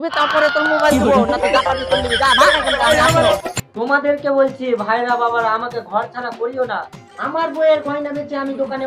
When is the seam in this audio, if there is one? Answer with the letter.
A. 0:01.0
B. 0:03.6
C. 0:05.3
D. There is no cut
B